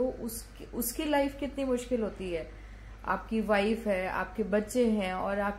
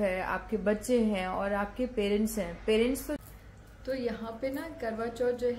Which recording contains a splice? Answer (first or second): second